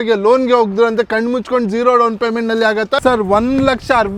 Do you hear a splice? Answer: yes; 1 cut; at 3.0 s

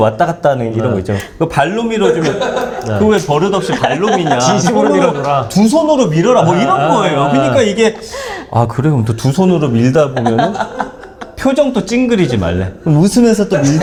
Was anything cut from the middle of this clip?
no; 0 cuts

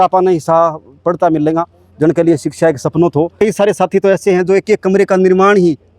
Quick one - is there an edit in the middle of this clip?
yes; 1 cut; at 3.3 s

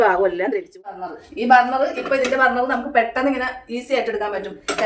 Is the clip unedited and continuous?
no; 1 cut; at 0.9 s

